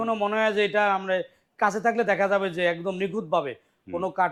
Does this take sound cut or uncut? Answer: uncut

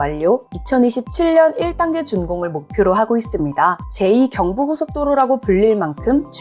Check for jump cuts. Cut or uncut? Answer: cut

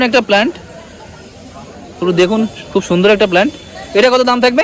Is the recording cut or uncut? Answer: uncut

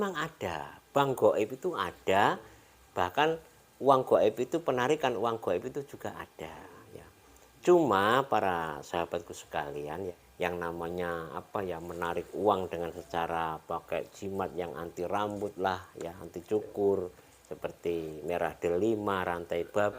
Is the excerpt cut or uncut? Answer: cut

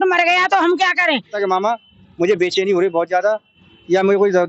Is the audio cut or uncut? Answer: cut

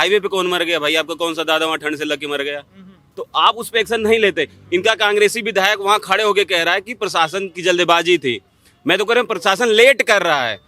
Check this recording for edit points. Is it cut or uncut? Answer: uncut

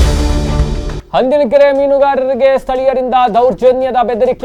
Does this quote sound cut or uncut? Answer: uncut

